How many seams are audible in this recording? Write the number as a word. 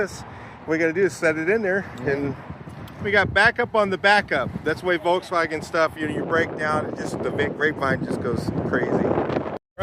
one